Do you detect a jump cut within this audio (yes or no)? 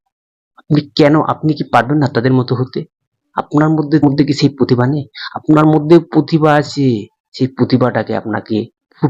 yes